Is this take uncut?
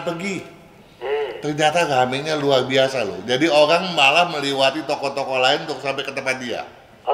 yes; 0 cuts

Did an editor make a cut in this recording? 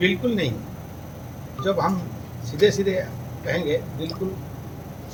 no; 0 cuts

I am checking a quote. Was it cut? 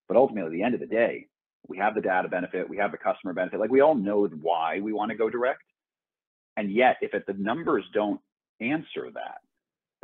no; 0 cuts

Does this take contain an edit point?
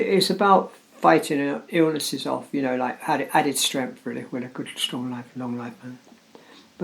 no; 0 cuts

